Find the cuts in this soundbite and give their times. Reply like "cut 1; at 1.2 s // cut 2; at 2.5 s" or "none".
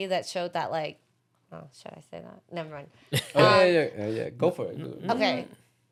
none